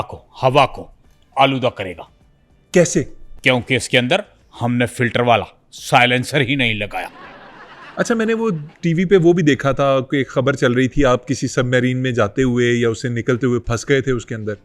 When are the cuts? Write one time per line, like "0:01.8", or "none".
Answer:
0:07.8